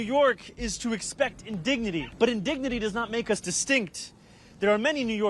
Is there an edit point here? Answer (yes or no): yes